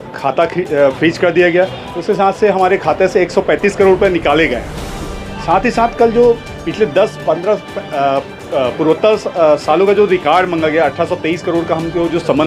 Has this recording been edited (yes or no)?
no